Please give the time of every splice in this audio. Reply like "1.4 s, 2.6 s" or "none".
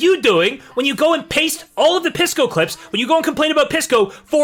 none